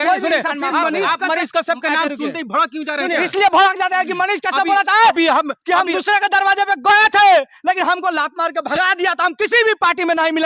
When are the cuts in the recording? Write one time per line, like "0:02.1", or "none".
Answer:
none